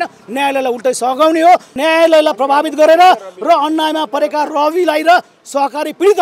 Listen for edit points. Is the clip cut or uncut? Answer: cut